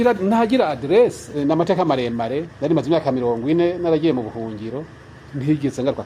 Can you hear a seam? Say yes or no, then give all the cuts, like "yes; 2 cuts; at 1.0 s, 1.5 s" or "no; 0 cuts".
yes; 2 cuts; at 1.4 s, 2.5 s